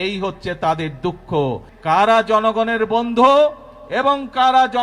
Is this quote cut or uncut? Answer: cut